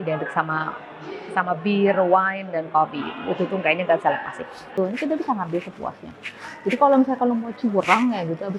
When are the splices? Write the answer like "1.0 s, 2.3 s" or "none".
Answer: 4.8 s